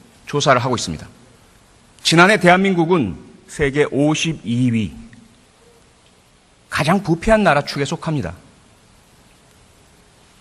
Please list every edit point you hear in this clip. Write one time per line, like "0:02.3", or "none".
none